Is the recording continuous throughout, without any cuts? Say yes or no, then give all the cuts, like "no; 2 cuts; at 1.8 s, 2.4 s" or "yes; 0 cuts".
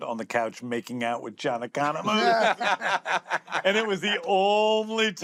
yes; 0 cuts